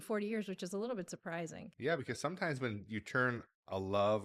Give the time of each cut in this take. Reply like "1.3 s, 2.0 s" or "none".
1.7 s